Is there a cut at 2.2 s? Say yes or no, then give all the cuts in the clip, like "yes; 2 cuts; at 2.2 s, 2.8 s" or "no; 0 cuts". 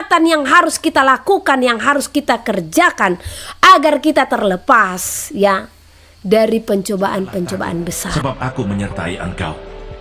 no; 1 cut; at 8.0 s